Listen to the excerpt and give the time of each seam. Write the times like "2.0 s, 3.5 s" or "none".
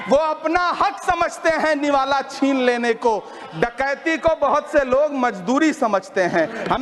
none